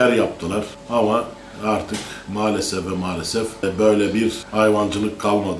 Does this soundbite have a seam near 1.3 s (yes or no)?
no